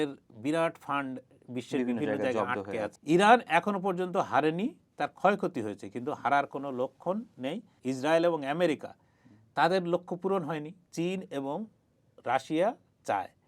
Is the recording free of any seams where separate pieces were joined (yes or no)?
no